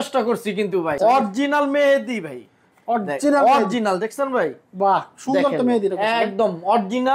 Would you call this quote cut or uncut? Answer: cut